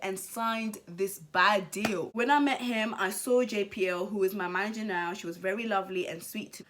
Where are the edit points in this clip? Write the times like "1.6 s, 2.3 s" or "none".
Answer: none